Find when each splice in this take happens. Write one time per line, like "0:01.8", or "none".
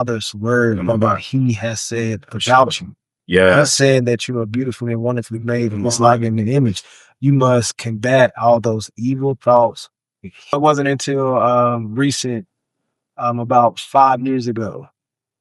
0:10.5